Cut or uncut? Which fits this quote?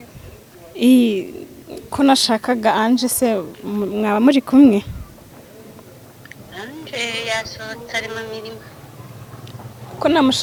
uncut